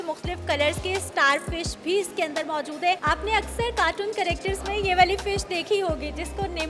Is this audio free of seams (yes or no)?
no